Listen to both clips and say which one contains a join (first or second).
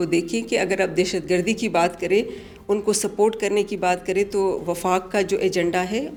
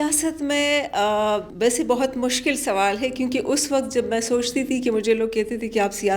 second